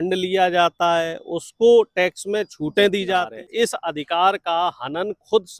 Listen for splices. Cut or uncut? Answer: cut